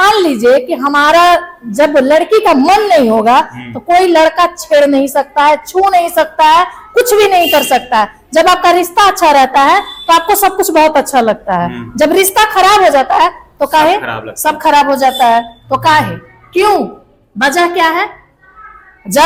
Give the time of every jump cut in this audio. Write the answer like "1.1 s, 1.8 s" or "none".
none